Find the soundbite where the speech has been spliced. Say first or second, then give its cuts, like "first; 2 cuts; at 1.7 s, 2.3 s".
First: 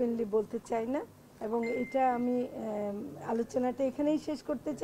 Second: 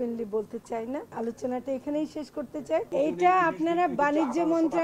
second; 2 cuts; at 1.1 s, 2.9 s